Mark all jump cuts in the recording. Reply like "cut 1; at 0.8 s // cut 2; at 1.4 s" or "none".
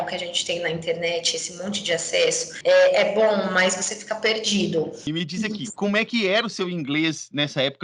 cut 1; at 5.0 s

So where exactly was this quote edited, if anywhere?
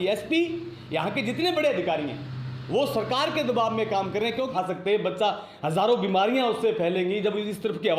cut 1; at 4.5 s

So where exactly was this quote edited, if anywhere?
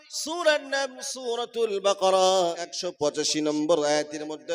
cut 1; at 2.8 s

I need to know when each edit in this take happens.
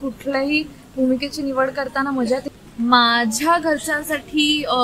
cut 1; at 2.4 s

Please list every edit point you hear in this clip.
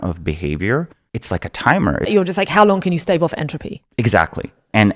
cut 1; at 1.0 s // cut 2; at 2.1 s

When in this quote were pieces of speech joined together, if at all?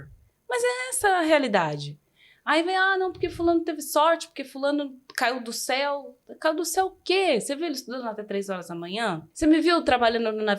cut 1; at 9.3 s

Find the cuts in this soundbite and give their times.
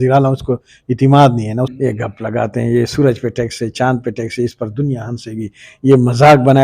cut 1; at 1.7 s

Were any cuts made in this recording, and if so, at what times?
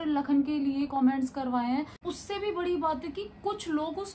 cut 1; at 2.0 s

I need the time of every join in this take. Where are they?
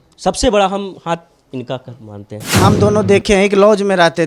cut 1; at 2.6 s

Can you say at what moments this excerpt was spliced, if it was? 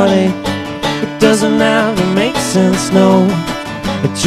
cut 1; at 1.1 s

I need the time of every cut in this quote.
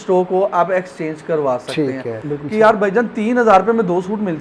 cut 1; at 2.3 s

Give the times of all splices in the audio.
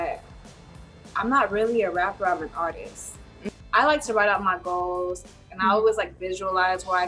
cut 1; at 3.5 s

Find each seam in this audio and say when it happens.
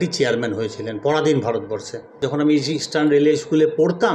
cut 1; at 2.2 s

